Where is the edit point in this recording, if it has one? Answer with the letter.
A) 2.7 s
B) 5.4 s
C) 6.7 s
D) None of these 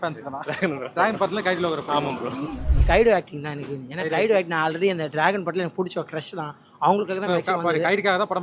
A